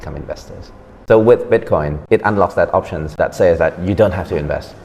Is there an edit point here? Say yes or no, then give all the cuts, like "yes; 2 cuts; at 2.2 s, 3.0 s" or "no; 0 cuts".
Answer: yes; 3 cuts; at 0.9 s, 1.9 s, 3.2 s